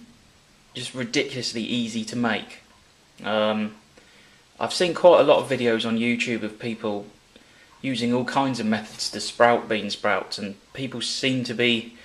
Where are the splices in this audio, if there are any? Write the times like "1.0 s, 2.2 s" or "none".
2.9 s